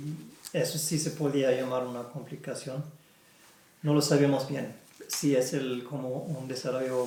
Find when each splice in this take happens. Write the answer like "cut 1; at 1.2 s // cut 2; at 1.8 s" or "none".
none